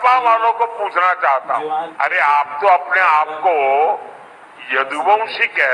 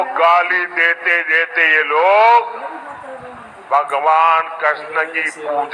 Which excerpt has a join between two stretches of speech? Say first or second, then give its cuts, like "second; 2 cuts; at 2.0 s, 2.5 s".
first; 1 cut; at 1.8 s